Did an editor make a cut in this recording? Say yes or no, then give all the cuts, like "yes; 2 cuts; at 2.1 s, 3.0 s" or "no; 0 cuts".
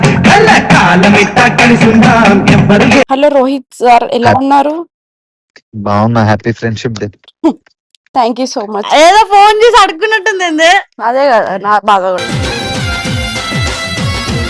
yes; 1 cut; at 3.1 s